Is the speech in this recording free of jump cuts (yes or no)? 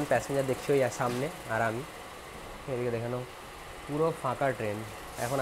yes